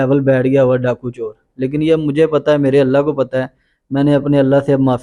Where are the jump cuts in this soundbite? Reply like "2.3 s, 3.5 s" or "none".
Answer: none